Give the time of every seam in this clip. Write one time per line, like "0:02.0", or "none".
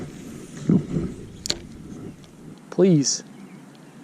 0:02.5